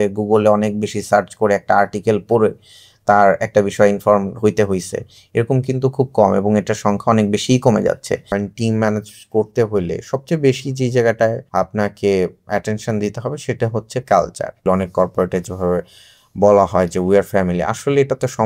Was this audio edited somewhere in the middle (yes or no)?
yes